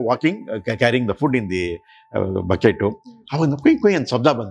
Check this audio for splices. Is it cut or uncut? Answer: uncut